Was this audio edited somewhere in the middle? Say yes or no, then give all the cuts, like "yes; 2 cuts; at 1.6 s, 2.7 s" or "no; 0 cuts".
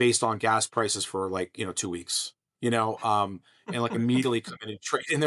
no; 0 cuts